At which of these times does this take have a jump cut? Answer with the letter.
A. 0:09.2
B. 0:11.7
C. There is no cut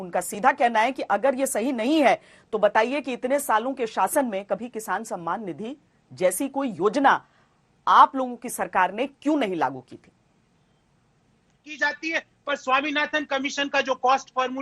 B